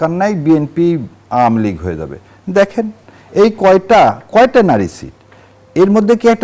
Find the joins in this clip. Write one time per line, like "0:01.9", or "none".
none

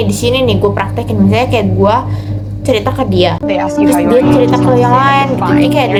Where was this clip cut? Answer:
none

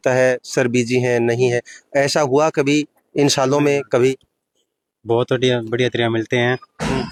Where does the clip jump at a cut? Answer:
none

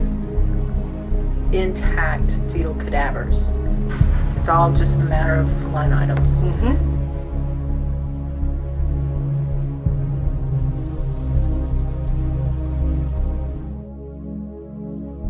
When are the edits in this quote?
0:08.1

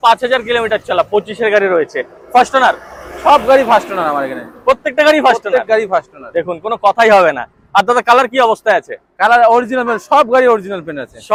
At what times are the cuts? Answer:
none

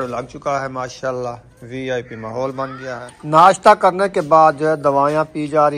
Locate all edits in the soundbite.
0:03.1

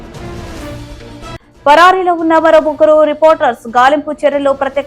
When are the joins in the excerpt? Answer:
0:01.5

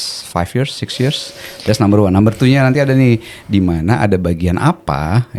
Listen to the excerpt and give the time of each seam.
none

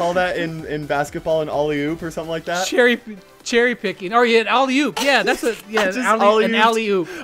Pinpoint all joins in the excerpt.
none

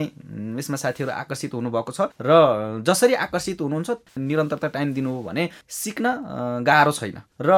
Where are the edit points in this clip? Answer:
none

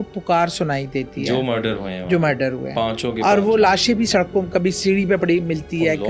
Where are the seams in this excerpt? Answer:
none

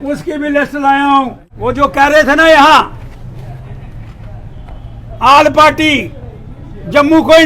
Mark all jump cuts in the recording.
0:01.4

